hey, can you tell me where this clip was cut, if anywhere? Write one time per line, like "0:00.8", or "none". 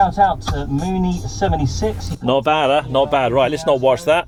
none